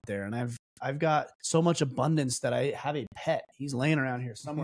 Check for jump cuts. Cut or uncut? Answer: cut